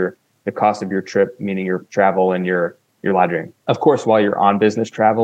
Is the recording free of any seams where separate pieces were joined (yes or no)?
no